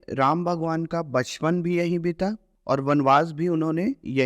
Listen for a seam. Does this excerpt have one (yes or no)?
yes